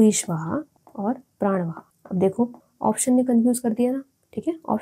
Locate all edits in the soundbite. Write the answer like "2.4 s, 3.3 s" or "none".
none